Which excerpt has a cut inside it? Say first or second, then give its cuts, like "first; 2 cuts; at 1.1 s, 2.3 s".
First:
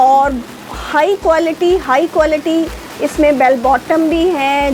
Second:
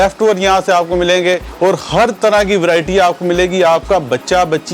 second; 1 cut; at 1.5 s